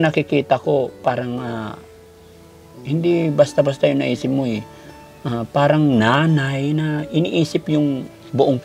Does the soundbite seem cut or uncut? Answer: uncut